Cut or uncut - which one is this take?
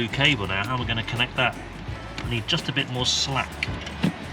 uncut